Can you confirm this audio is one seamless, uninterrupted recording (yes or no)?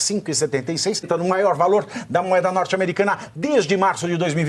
no